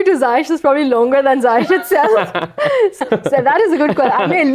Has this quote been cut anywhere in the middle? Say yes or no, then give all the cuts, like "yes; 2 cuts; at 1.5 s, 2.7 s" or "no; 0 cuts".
yes; 1 cut; at 3.0 s